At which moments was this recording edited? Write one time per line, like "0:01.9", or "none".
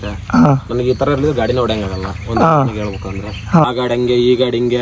0:03.7